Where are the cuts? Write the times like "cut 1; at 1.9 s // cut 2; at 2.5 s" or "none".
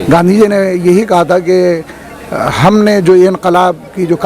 none